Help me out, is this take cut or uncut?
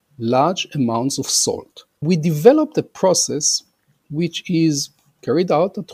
cut